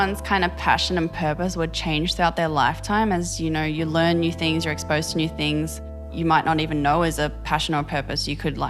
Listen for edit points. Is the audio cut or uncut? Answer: cut